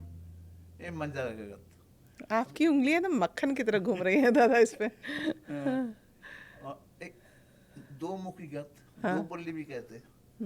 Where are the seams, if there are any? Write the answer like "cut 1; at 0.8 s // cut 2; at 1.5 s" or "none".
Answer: none